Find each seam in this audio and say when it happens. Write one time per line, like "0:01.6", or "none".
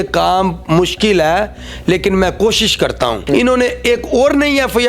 0:03.2